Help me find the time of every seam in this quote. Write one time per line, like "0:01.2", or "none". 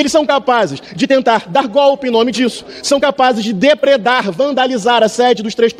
none